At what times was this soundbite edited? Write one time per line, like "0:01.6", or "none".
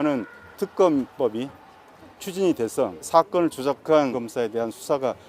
0:03.1
0:04.1